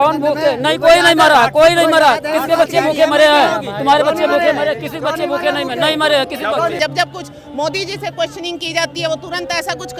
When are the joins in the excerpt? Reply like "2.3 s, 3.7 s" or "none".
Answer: 6.8 s